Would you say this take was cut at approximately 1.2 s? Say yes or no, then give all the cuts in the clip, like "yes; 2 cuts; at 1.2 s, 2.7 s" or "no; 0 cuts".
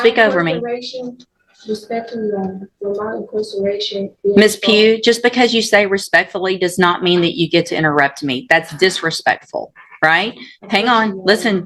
no; 0 cuts